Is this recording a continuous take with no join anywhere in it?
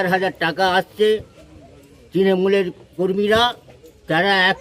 yes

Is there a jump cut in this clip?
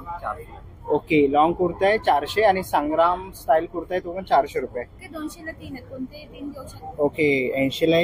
yes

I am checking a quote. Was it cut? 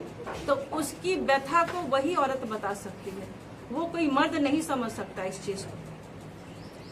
no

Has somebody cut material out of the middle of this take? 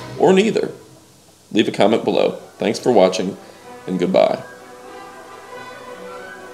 no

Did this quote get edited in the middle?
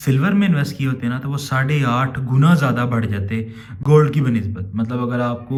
no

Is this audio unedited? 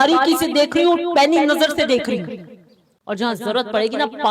yes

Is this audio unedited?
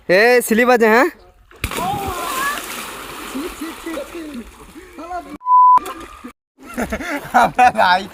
yes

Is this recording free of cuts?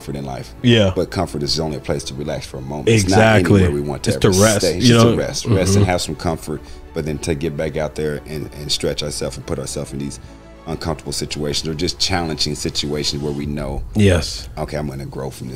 yes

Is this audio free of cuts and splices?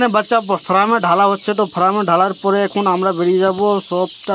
yes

